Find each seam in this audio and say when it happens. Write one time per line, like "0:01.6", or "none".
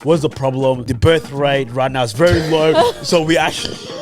0:00.9